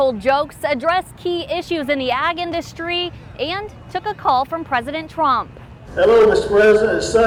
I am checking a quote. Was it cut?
no; 0 cuts

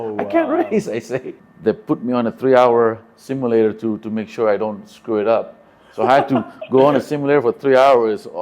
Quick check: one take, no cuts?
no; 1 cut; at 1.4 s

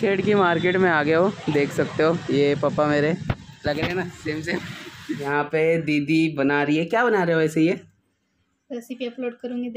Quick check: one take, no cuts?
no; 1 cut; at 5.3 s

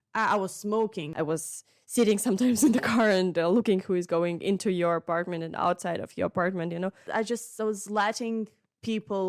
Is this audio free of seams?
no; 2 cuts; at 1.0 s, 7.0 s

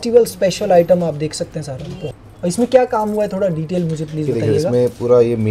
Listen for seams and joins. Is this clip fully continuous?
no; 1 cut; at 2.0 s

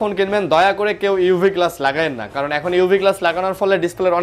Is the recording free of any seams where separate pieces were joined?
yes; 0 cuts

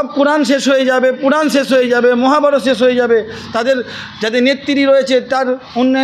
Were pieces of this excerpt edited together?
no; 0 cuts

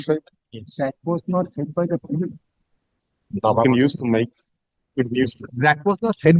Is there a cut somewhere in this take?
no; 0 cuts

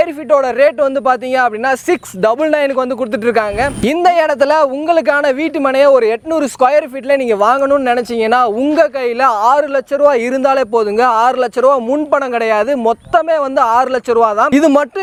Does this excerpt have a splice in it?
no; 0 cuts

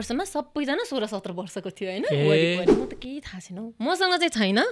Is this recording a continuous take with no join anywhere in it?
no; 1 cut; at 2.7 s

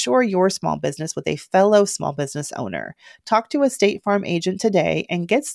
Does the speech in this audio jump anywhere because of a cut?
no; 0 cuts

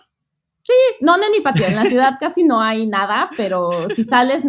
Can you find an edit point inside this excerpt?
no; 0 cuts

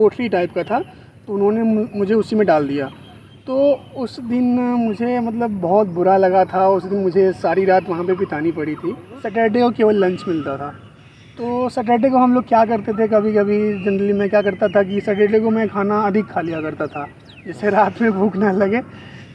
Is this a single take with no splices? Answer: no; 1 cut; at 9.1 s

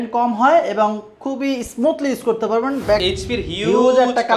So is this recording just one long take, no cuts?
no; 1 cut; at 3.0 s

